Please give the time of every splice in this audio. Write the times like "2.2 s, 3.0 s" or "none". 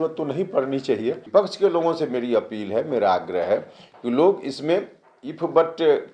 1.2 s